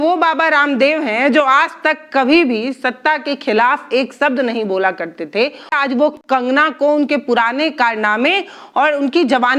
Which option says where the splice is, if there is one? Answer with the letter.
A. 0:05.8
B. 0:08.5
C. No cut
A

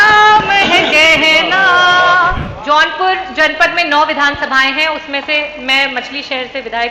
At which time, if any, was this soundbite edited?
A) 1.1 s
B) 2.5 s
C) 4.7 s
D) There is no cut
B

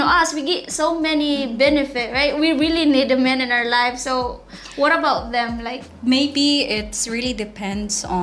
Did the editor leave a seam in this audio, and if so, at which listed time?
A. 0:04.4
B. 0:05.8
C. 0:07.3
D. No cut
B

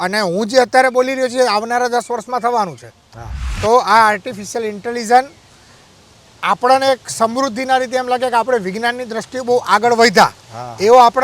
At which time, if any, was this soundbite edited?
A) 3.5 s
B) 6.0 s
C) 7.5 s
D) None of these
A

